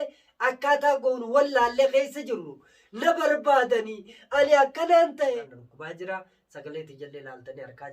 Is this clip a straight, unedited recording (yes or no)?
no